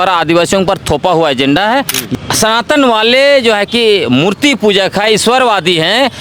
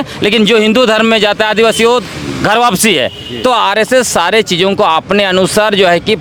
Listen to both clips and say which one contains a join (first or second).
first